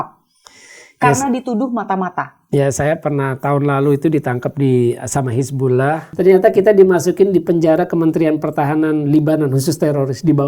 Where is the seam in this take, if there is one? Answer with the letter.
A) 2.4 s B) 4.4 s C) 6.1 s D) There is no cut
C